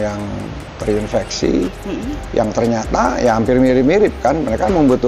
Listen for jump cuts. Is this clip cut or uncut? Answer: uncut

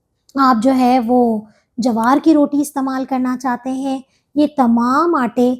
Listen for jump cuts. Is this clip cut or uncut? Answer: uncut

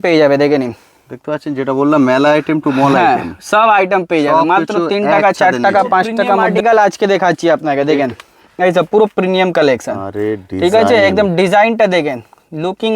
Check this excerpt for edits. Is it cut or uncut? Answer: cut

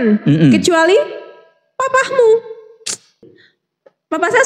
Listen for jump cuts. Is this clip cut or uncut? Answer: cut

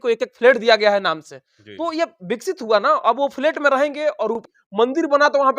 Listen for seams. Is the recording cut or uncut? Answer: cut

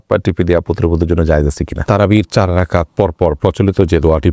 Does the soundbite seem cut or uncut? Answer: cut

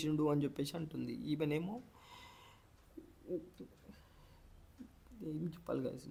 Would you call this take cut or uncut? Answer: uncut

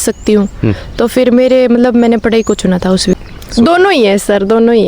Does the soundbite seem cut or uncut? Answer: cut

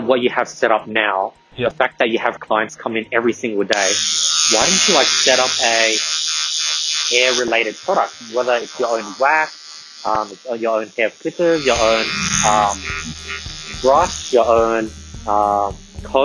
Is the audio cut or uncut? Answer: uncut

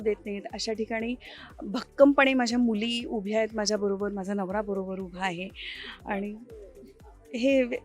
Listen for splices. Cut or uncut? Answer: uncut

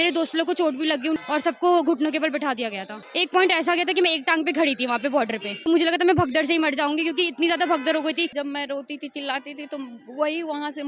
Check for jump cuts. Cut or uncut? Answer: cut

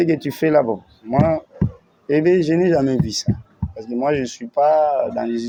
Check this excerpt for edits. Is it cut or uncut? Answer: uncut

